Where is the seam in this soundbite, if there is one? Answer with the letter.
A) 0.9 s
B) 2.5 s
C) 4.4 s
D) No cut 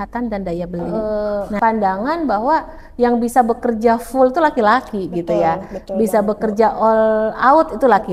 A